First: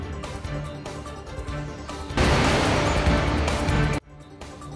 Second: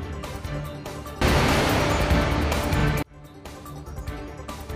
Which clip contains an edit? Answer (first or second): second